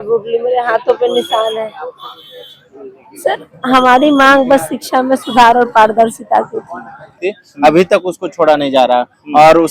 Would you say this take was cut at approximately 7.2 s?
yes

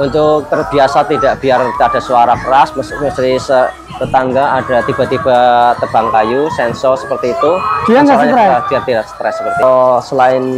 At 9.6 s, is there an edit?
yes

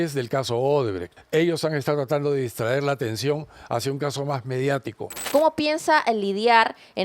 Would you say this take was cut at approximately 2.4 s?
no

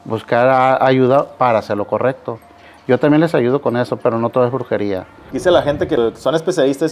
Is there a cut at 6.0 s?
yes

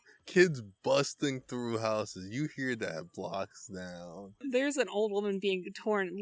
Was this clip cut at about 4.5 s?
yes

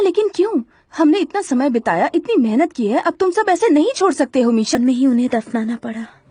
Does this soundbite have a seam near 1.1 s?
no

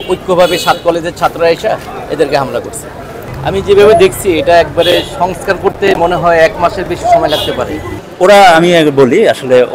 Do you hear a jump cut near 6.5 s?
no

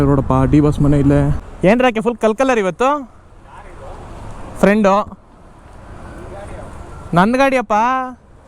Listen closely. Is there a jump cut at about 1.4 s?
yes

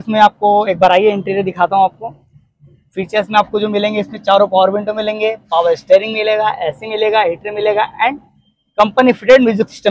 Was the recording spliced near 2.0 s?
no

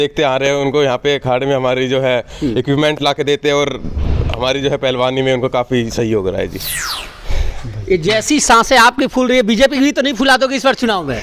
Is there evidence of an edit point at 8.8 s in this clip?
no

